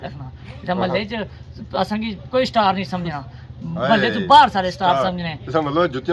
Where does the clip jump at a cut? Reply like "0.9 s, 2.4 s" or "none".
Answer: none